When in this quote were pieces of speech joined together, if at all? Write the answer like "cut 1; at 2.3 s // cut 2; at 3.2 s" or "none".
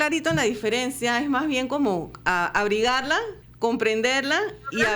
cut 1; at 3.4 s